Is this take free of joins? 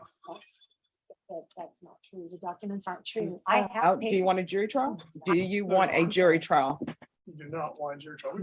no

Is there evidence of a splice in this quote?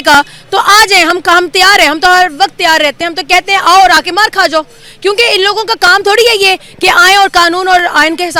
no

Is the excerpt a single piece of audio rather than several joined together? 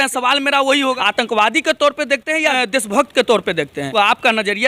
no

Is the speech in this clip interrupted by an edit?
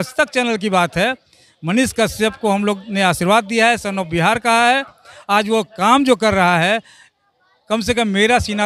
no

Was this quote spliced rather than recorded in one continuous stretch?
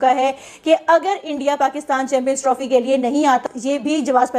yes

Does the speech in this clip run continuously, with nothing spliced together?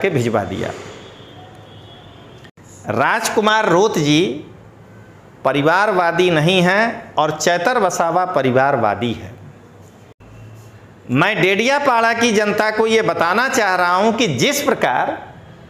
no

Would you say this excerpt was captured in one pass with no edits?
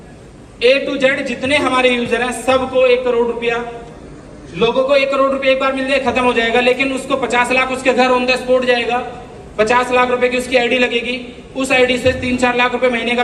yes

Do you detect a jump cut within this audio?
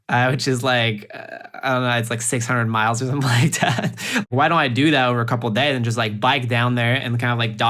yes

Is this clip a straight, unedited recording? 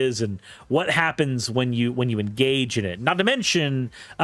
yes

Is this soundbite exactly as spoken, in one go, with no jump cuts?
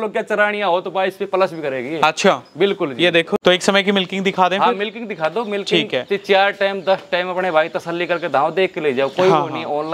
no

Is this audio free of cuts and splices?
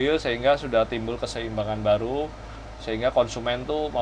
yes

